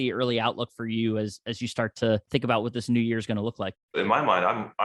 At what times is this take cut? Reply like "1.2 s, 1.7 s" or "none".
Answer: 2.2 s, 4.0 s